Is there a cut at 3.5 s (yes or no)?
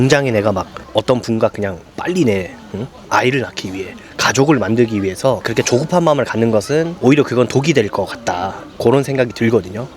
no